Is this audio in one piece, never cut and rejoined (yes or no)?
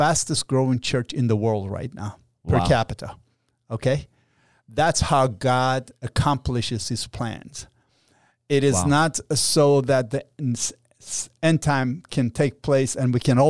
yes